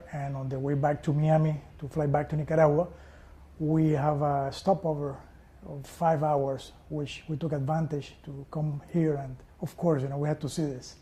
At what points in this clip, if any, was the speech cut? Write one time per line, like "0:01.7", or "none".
0:09.4

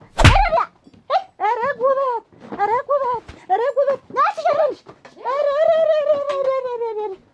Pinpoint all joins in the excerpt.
none

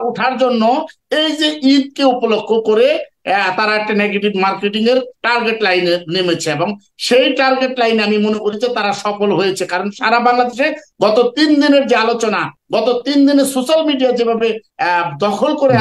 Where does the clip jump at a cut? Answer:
none

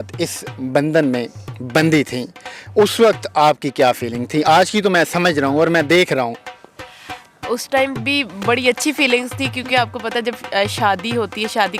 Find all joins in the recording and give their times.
none

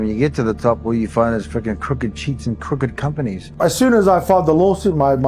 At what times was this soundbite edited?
0:03.5

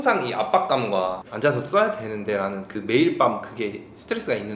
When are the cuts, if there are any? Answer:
0:01.2

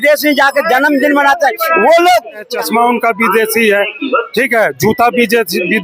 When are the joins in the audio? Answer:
0:02.6

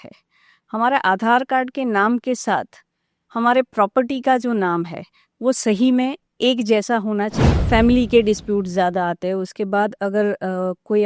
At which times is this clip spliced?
0:07.4

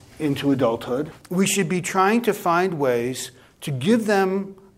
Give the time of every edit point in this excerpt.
0:01.2

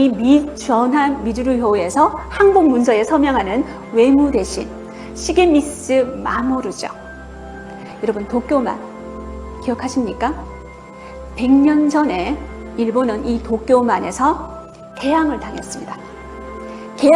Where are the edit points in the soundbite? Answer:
none

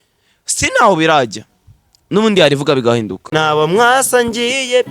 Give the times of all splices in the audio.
0:03.2

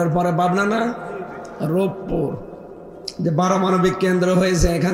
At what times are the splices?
none

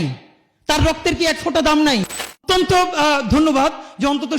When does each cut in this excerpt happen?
0:02.4

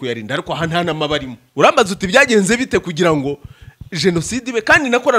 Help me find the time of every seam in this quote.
0:01.4

